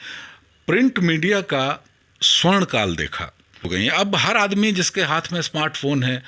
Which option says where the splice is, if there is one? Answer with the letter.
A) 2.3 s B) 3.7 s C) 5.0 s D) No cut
B